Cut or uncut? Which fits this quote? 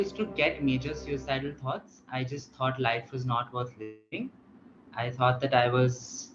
uncut